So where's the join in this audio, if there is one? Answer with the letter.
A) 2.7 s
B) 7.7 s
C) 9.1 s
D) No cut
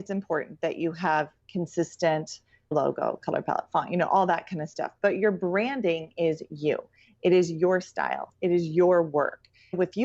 A